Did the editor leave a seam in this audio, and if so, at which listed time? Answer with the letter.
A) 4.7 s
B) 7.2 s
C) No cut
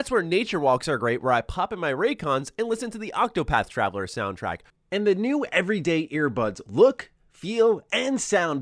A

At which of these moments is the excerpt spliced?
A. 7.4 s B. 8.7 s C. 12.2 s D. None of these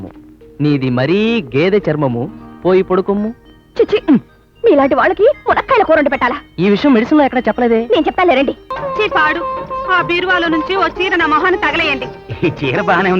B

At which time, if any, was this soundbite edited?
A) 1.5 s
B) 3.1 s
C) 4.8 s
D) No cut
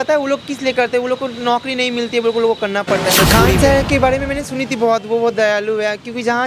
B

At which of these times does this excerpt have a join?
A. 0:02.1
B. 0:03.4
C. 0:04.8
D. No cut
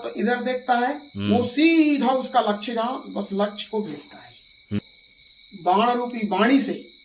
C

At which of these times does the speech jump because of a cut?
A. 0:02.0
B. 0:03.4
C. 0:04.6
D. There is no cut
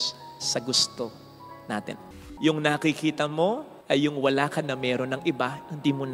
A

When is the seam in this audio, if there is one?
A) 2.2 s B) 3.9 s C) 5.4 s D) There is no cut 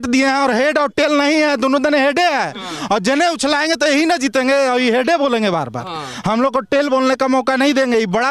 D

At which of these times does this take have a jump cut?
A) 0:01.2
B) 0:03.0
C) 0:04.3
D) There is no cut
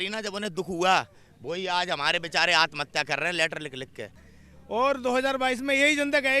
C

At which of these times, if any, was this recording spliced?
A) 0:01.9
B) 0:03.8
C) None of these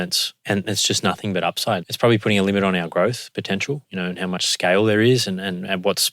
A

